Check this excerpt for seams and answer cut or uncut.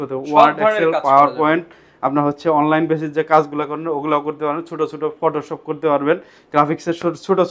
uncut